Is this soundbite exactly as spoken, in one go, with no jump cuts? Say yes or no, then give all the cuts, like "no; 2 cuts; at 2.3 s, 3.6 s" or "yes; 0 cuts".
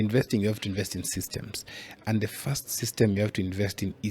yes; 0 cuts